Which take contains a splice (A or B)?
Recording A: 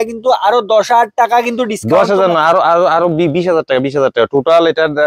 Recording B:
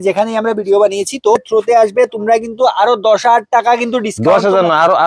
B